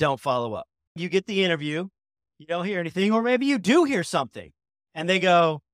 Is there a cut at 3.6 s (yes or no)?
no